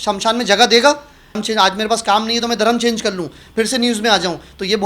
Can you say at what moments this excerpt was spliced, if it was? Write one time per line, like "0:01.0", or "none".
0:01.4